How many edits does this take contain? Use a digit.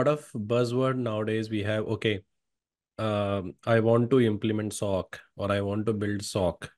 0